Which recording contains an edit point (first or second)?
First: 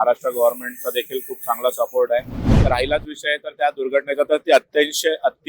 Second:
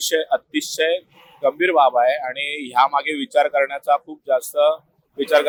first